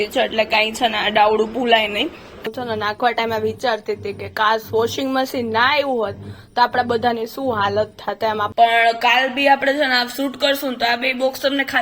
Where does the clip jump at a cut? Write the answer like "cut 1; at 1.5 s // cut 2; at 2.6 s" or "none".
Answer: cut 1; at 2.4 s // cut 2; at 8.5 s